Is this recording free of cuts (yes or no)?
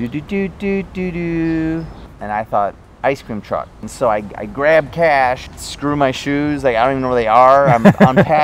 no